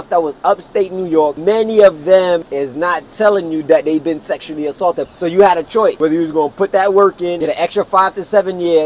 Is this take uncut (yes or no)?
no